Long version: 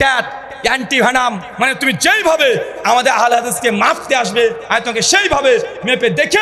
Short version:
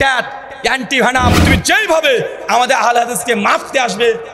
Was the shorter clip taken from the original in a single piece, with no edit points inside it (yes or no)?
no